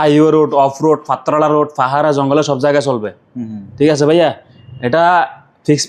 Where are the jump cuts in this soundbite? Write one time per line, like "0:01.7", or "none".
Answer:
none